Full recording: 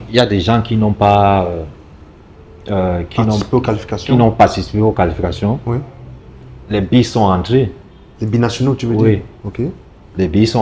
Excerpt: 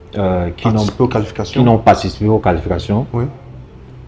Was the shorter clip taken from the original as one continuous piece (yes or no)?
yes